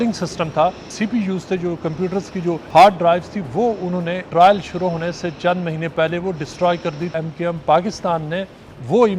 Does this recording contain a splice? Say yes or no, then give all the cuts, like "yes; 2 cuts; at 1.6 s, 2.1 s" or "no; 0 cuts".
yes; 4 cuts; at 0.9 s, 2.6 s, 4.2 s, 7.1 s